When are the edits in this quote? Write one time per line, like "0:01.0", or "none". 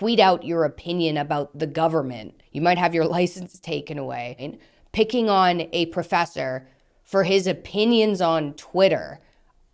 0:04.5

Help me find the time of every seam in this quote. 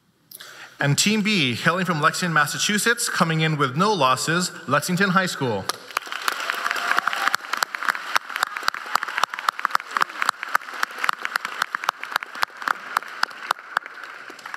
none

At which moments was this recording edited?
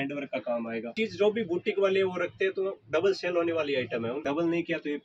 0:01.0
0:04.2

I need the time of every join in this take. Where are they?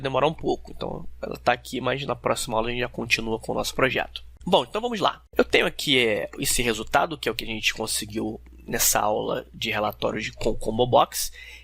0:01.0

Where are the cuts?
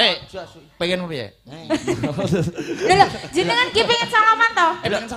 none

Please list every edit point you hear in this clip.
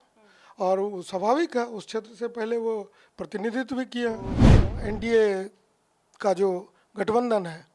0:04.5

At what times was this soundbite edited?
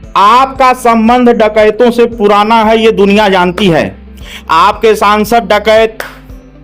none

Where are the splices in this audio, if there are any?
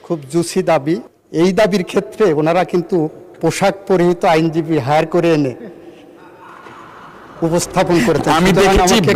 0:01.2

